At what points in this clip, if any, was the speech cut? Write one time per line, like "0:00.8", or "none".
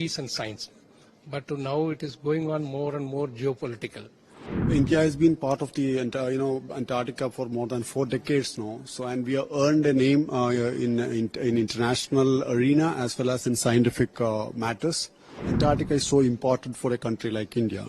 0:04.6
0:15.5

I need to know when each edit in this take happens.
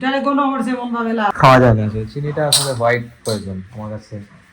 0:01.3

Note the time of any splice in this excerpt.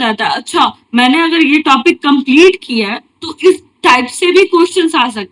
none

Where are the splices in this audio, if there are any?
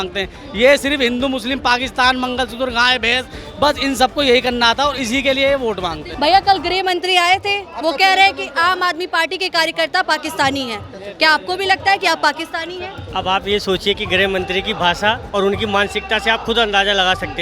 0:06.0

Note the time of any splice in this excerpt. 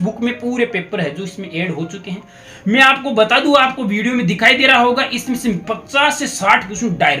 0:02.4

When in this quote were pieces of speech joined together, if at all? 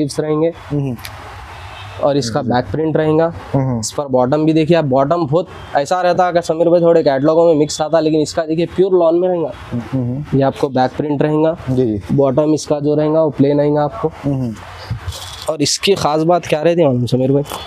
0:09.8

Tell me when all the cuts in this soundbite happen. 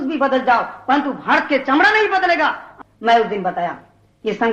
0:02.7

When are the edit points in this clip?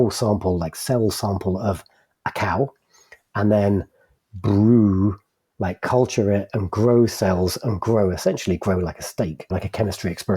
0:09.5

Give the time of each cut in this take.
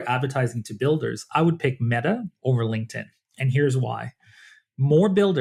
none

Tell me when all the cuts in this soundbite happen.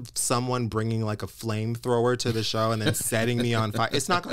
none

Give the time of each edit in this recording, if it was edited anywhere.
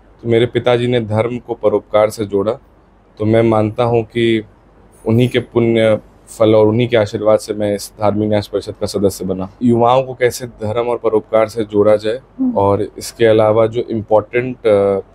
0:09.5

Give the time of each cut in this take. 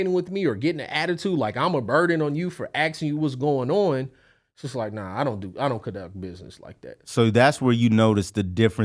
none

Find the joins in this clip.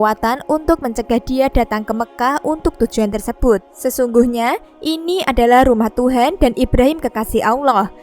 0:03.7

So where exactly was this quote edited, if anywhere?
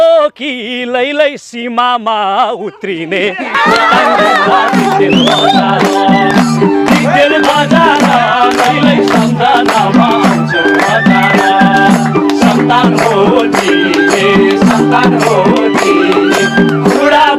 none

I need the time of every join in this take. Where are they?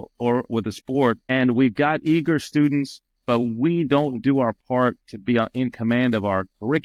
none

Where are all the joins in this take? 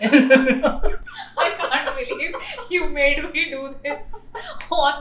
none

